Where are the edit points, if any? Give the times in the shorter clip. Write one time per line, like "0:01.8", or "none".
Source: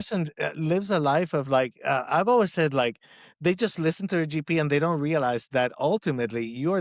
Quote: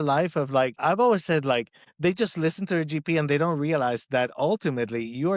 0:00.8
0:01.8

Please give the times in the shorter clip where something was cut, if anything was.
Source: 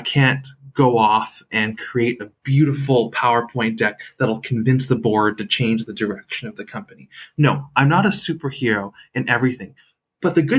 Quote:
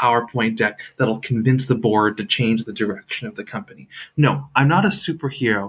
none

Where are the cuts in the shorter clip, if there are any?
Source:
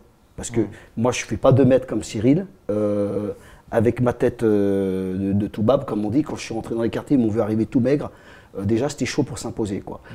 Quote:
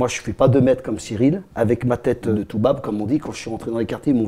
0:01.5
0:02.3

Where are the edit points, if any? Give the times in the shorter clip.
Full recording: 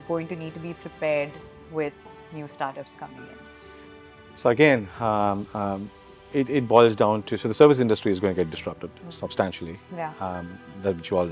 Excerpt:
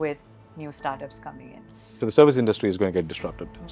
0:01.9

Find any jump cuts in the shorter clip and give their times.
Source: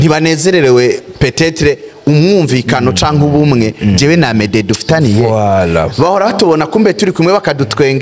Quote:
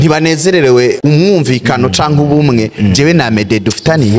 0:01.0

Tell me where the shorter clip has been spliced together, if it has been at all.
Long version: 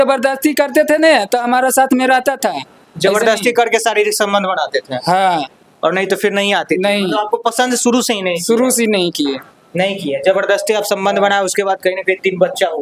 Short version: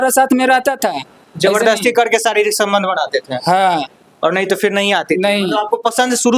none

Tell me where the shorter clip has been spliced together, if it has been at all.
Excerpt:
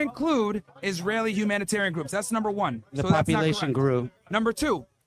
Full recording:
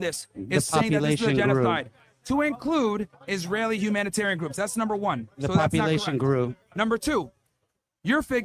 none

